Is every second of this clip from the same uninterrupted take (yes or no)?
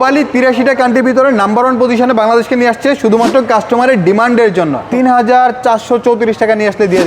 no